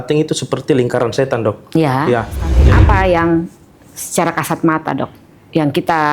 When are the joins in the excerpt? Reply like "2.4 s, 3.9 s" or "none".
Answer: 2.6 s